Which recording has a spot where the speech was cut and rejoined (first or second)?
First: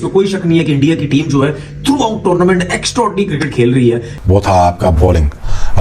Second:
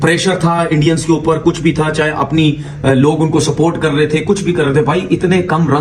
first